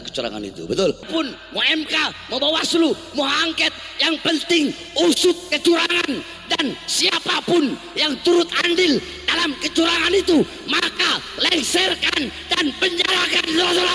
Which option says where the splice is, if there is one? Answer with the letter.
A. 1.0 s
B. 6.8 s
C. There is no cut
A